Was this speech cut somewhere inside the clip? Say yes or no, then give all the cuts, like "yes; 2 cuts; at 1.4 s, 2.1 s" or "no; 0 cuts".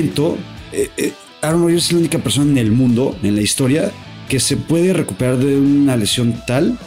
no; 0 cuts